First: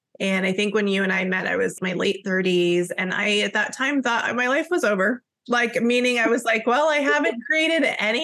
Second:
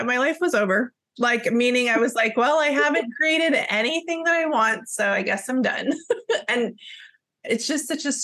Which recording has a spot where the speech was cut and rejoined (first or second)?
first